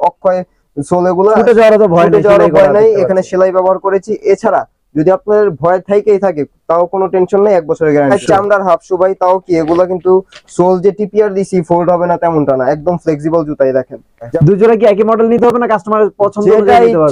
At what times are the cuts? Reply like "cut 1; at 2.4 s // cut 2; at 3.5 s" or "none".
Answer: cut 1; at 8.2 s // cut 2; at 14.3 s

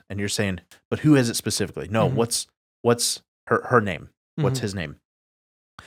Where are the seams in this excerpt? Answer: none

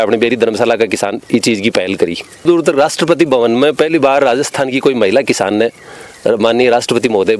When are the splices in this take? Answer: cut 1; at 2.4 s

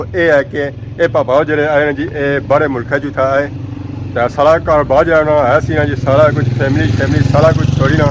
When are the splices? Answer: none

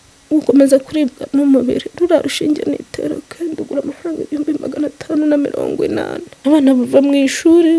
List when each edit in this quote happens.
cut 1; at 6.2 s

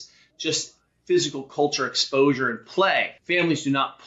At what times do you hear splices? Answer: cut 1; at 3.2 s

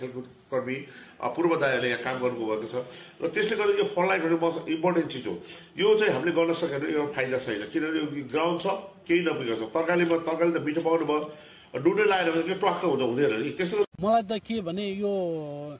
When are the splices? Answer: cut 1; at 13.9 s

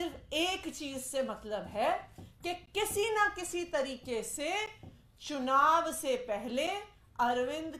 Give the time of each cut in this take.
none

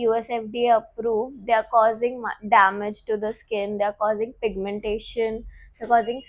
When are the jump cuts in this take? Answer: none

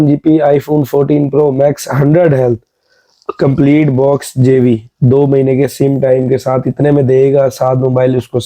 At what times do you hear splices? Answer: none

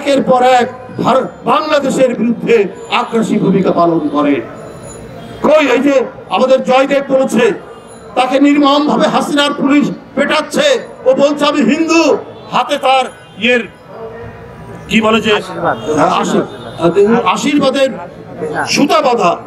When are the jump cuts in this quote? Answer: none

